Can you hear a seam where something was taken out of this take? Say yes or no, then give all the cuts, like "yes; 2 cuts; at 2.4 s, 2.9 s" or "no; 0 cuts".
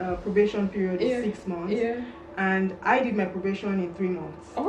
no; 0 cuts